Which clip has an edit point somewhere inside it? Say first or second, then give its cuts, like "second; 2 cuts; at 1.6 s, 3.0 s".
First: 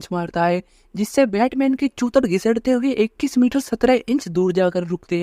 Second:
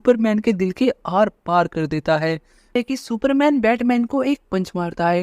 second; 1 cut; at 2.8 s